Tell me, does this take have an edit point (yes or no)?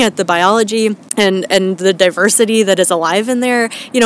yes